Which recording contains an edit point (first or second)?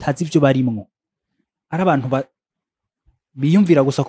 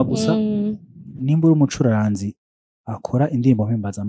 second